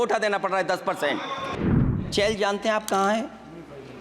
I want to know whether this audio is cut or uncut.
cut